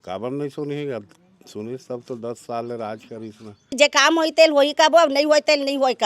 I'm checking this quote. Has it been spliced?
yes; 1 cut; at 3.7 s

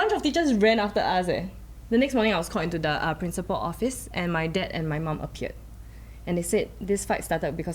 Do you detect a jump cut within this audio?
no; 0 cuts

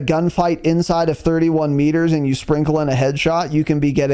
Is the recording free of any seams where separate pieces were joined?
yes; 0 cuts

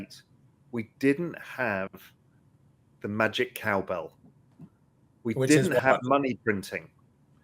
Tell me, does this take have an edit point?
no; 0 cuts

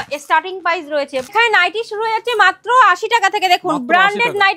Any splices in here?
yes; 1 cut; at 1.3 s

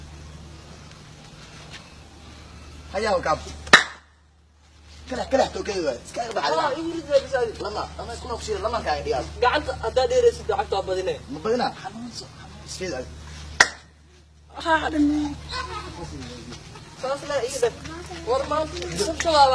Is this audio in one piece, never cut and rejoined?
no; 1 cut; at 2.3 s

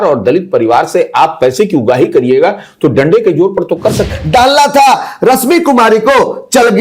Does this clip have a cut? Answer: yes; 1 cut; at 4.1 s

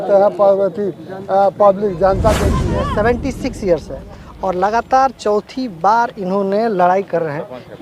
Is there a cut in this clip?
yes; 1 cut; at 2.6 s

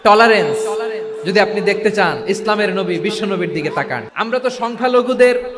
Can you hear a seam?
yes; 1 cut; at 4.0 s

